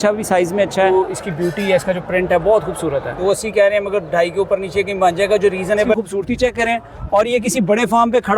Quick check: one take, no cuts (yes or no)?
no